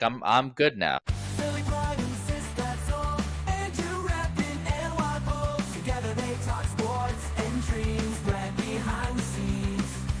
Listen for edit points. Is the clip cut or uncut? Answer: cut